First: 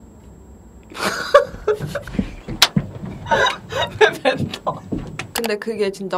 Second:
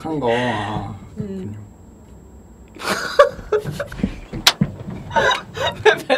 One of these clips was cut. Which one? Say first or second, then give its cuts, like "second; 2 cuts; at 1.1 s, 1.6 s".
first; 1 cut; at 5.3 s